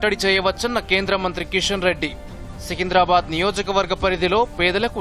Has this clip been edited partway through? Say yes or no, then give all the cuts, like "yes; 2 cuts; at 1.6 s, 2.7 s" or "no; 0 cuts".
no; 0 cuts